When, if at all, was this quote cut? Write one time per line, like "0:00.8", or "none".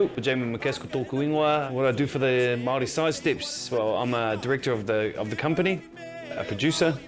0:01.7